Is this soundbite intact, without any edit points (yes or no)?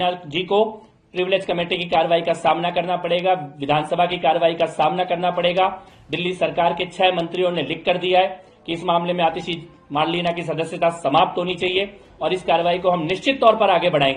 yes